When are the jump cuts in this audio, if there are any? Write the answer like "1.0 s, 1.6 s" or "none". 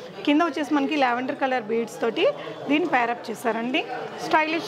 none